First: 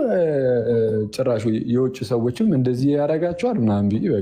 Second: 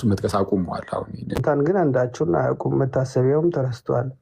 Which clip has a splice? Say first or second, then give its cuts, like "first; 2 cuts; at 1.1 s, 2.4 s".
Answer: second; 1 cut; at 1.3 s